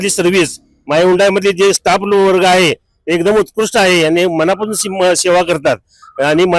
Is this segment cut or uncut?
uncut